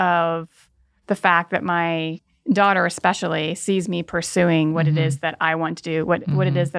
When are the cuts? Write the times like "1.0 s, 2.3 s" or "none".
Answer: 2.3 s